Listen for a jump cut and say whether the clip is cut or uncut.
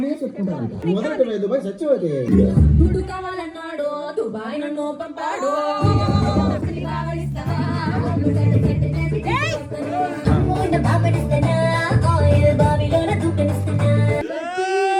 cut